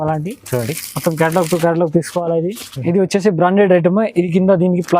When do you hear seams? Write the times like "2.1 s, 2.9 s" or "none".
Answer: 2.7 s